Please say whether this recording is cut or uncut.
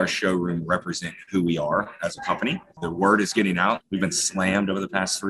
cut